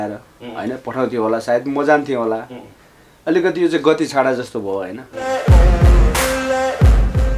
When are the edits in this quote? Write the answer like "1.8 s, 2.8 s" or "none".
5.1 s